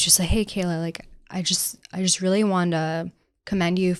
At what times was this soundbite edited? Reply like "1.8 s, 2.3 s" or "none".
none